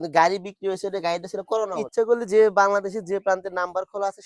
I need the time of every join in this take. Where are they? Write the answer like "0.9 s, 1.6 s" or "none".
1.8 s